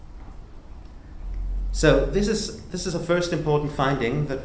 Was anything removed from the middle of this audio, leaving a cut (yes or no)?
no